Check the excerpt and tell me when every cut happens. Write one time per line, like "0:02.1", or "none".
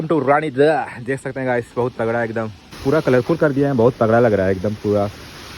0:02.6

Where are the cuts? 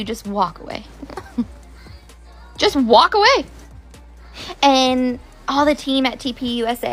none

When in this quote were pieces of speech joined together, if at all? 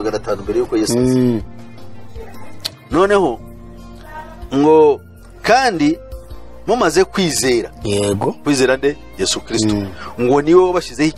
none

